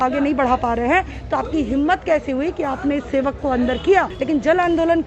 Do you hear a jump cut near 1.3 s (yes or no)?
no